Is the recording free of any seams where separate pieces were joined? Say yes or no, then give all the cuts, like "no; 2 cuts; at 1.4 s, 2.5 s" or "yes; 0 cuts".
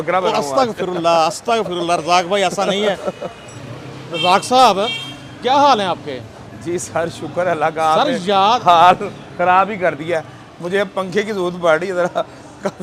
yes; 0 cuts